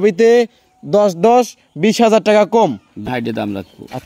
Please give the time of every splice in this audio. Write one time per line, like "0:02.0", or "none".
0:03.1

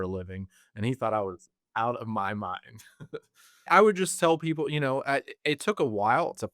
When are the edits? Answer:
0:03.7

